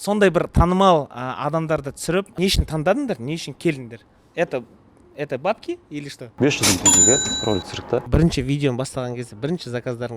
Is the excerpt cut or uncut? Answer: cut